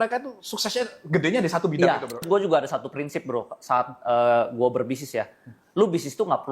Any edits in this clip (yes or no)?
yes